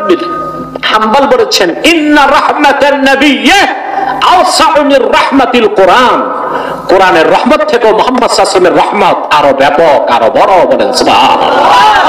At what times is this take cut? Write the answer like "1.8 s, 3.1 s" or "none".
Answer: none